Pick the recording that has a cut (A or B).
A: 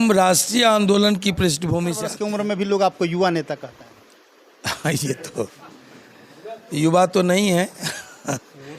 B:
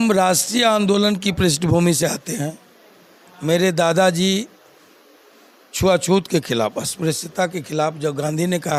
A